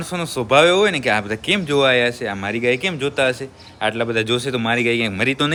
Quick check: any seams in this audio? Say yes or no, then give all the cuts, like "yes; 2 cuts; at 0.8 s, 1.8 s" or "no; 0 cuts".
no; 0 cuts